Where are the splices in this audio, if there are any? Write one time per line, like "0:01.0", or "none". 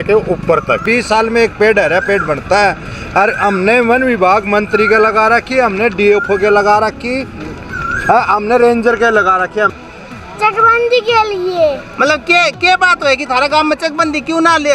0:00.8
0:09.7